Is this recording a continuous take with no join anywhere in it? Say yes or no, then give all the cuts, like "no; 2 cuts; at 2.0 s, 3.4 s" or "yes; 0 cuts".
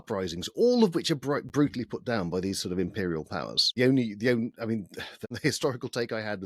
no; 2 cuts; at 3.7 s, 5.0 s